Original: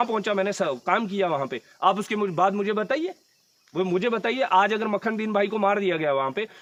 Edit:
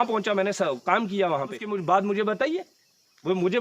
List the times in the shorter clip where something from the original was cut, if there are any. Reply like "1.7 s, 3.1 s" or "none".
1.6 s

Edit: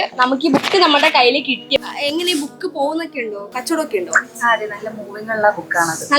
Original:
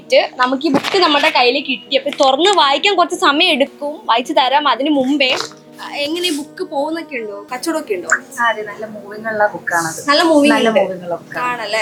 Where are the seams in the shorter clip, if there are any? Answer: 1.9 s

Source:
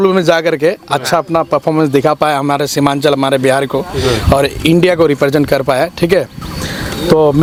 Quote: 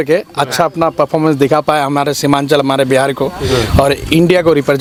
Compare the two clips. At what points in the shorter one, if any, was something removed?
none

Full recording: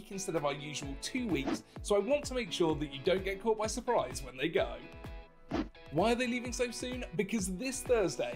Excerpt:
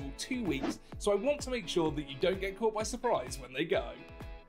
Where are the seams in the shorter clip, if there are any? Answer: none

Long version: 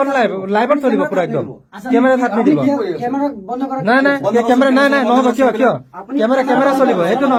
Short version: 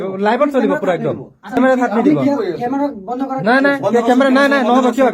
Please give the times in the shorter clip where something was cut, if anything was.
1.6 s

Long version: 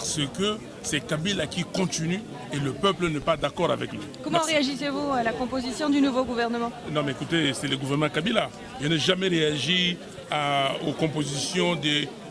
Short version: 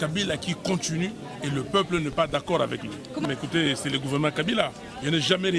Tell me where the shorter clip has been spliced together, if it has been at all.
3.2 s

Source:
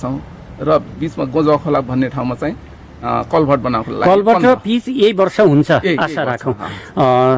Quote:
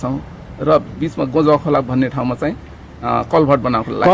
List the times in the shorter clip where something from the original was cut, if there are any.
none

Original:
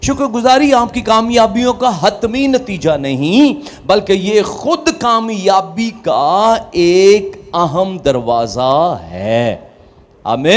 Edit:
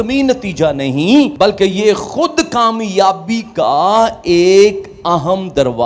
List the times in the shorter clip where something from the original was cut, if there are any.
1.3 s

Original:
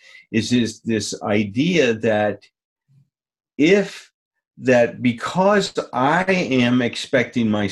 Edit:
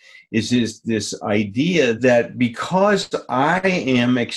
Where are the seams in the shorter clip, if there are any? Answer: 2.0 s

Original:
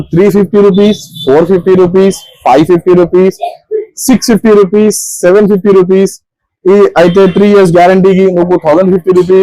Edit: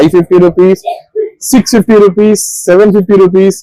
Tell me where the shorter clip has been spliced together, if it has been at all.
none

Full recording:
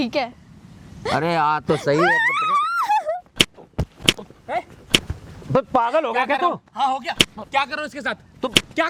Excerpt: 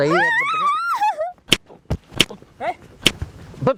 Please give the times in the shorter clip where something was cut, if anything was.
none

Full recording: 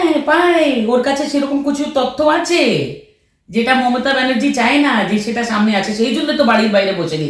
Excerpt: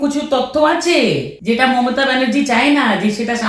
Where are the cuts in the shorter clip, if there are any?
1.3 s

